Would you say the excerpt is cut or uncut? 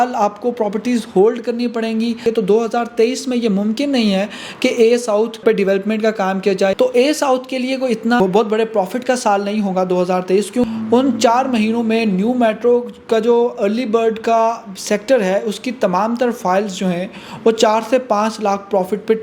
cut